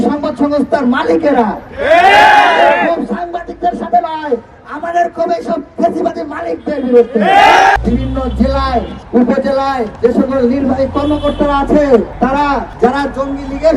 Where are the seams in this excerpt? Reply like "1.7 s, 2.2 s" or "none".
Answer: 7.8 s, 9.0 s, 9.9 s, 12.4 s

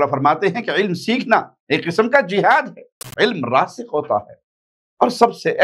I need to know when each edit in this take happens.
3.1 s

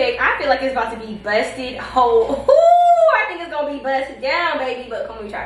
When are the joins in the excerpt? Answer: none

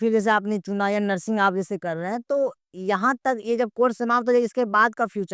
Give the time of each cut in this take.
none

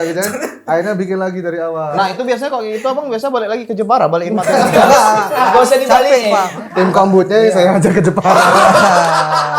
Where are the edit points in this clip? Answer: 1.9 s, 6.5 s

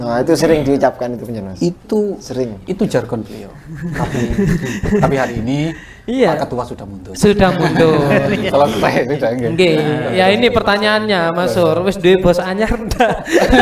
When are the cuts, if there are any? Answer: 3.8 s

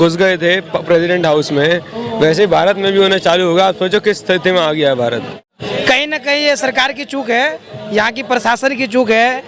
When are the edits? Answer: 5.5 s

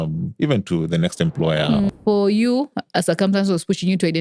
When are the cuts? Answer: 1.9 s

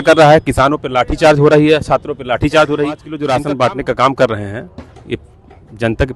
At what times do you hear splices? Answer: 3.1 s

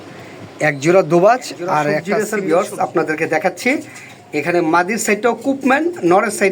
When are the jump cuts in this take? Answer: 2.1 s

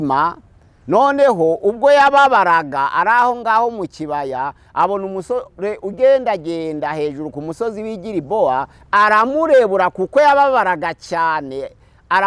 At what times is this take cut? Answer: 8.8 s

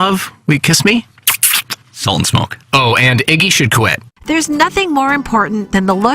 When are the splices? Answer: 4.1 s

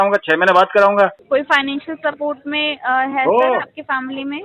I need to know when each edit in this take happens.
1.2 s

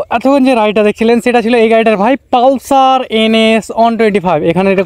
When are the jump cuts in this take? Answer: none

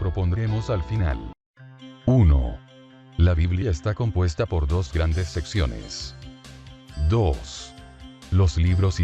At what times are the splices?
1.1 s

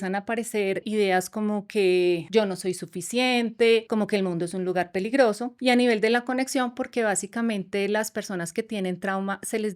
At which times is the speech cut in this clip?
0.9 s, 2.2 s, 3.9 s, 5.5 s

